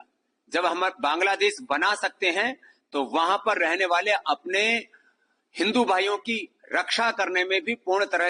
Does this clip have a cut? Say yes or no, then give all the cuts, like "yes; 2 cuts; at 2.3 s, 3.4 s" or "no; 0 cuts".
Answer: no; 0 cuts